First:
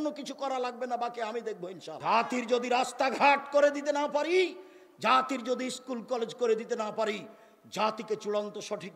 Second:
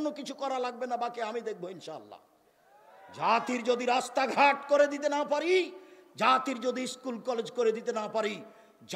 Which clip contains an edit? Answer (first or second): first